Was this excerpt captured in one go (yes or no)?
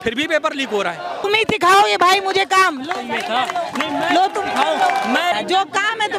no